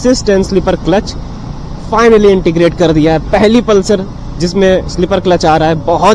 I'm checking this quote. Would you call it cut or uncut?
uncut